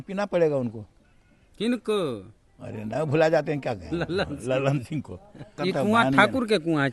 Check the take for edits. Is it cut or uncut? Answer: cut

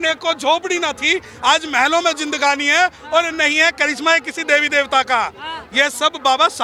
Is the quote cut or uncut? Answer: uncut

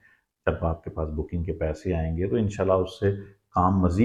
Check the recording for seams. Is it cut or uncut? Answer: uncut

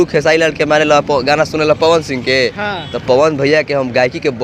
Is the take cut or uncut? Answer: uncut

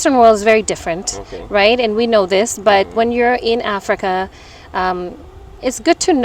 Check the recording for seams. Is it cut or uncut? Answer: uncut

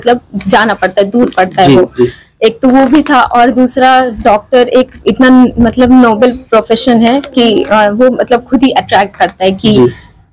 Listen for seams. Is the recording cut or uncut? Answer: uncut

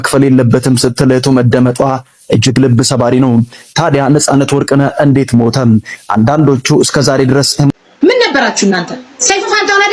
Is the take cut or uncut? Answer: cut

